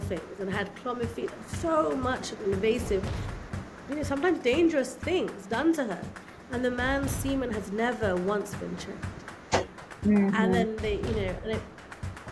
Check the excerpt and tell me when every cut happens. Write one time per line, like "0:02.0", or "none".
none

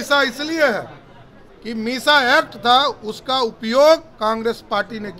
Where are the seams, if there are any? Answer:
none

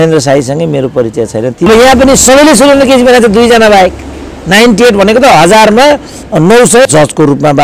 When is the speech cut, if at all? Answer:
0:01.7
0:06.9

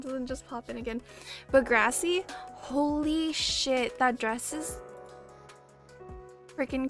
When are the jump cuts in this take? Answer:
none

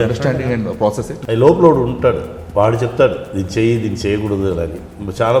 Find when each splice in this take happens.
0:01.1

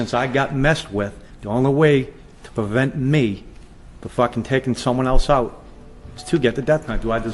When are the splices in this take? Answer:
none

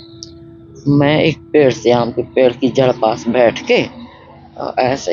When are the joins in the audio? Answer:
none

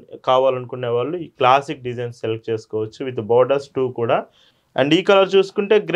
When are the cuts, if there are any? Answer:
0:04.6

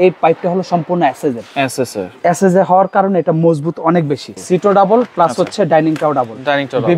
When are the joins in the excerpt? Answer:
0:04.4

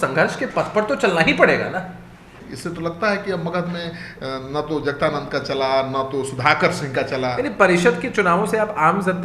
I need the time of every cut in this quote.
0:02.3

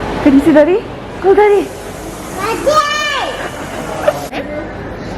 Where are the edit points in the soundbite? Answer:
0:04.3

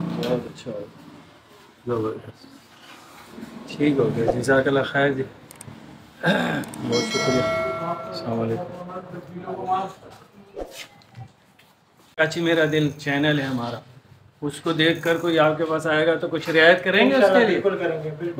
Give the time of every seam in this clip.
0:12.2

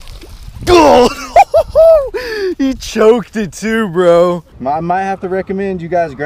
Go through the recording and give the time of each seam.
0:04.5

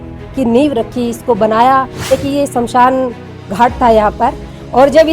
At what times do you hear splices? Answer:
0:02.1

